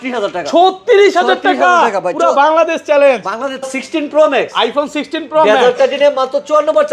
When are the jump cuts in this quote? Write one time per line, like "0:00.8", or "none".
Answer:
0:03.7